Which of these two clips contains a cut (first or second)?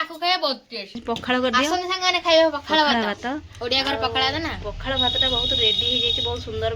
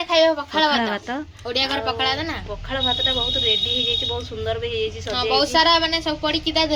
first